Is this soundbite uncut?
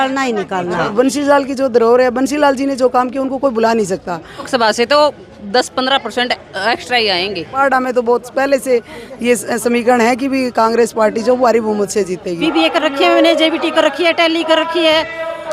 no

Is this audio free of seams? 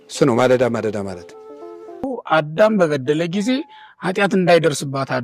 no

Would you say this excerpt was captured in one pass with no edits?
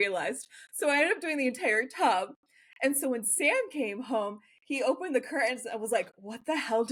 yes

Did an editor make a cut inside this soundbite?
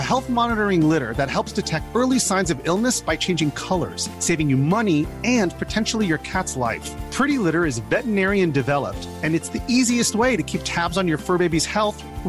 no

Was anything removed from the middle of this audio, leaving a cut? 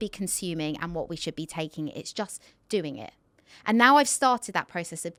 no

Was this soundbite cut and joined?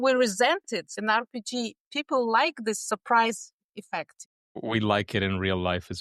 yes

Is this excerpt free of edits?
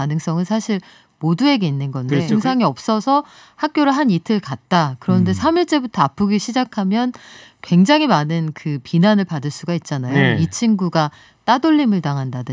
no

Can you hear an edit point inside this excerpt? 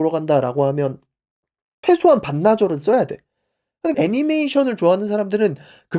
yes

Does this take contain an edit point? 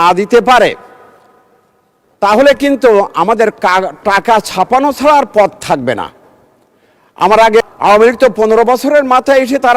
yes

